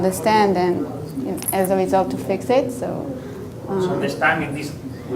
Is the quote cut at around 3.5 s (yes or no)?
no